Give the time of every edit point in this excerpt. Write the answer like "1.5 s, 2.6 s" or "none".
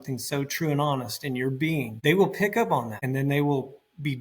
1.9 s, 3.0 s